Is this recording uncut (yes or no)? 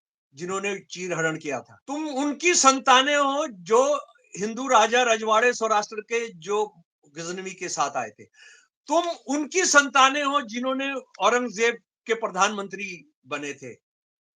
no